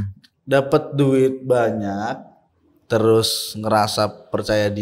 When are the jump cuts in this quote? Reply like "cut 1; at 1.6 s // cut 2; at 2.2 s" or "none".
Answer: none

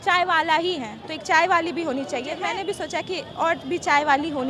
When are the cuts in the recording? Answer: cut 1; at 2.3 s

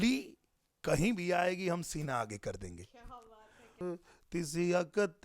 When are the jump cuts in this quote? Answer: cut 1; at 3.8 s

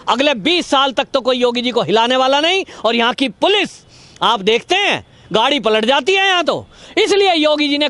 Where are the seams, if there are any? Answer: cut 1; at 6.8 s

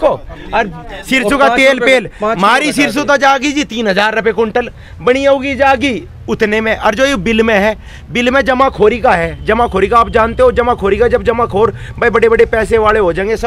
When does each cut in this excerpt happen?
none

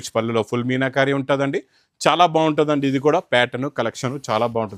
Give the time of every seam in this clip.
none

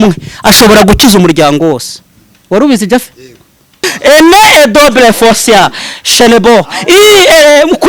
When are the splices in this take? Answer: cut 1; at 3.9 s

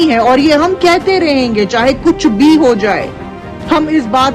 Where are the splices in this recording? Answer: none

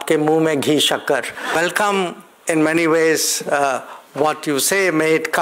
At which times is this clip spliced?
cut 1; at 1.5 s

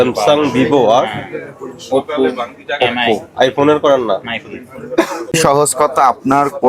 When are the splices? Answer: cut 1; at 5.3 s

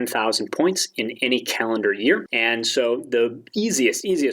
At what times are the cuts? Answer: cut 1; at 2.3 s

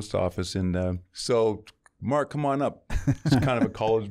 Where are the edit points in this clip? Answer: cut 1; at 1.1 s

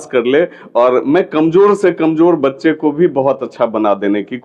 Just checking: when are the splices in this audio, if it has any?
none

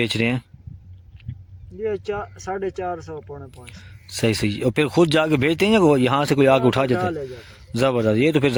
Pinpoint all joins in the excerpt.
none

